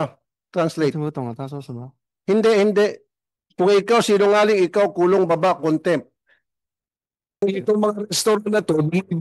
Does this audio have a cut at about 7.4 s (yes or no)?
yes